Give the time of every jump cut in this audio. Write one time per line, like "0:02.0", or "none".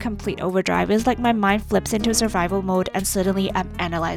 none